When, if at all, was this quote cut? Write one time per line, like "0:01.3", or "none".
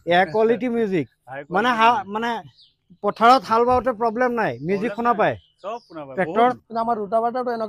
0:06.3